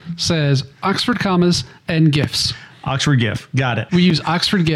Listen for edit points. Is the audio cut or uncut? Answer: uncut